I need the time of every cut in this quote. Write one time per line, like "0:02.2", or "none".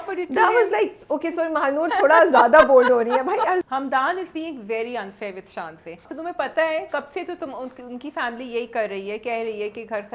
0:03.6
0:06.1